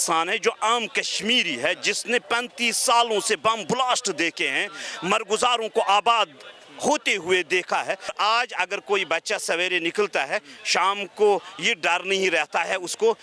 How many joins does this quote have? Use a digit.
1